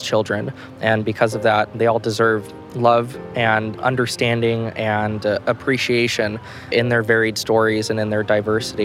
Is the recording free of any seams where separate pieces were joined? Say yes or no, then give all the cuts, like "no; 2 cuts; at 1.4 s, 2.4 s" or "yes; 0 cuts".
yes; 0 cuts